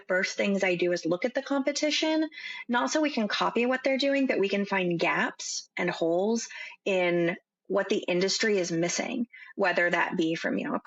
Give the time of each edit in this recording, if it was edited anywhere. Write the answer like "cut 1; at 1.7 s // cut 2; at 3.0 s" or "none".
none